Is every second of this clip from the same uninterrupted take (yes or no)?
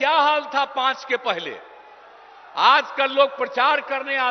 yes